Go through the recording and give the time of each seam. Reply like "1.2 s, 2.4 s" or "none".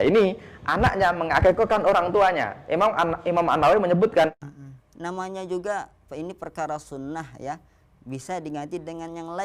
4.4 s